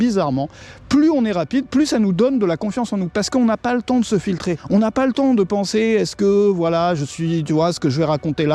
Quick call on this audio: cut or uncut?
cut